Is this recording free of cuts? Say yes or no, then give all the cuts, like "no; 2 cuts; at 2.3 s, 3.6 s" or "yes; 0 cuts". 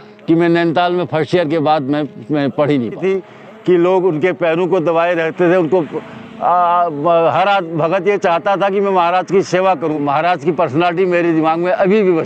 no; 2 cuts; at 3.0 s, 10.0 s